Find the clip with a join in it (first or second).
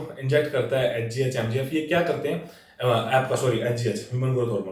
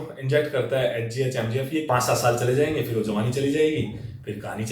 second